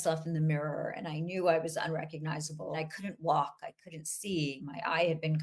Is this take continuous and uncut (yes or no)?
no